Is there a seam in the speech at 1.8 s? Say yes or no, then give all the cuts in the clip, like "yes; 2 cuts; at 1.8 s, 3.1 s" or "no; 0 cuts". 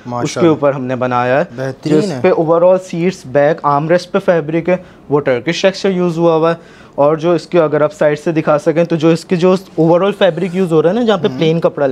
no; 0 cuts